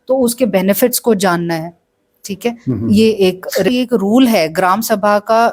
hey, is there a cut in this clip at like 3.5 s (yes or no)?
yes